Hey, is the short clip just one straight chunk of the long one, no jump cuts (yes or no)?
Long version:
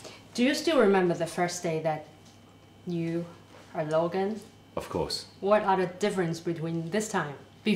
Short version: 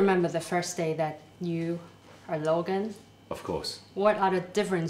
no